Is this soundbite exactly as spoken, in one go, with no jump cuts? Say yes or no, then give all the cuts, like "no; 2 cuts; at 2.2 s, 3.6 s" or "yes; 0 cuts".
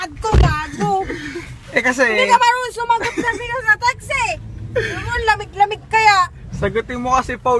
yes; 0 cuts